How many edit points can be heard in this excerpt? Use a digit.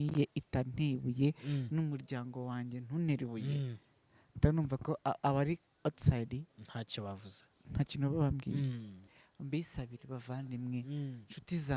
1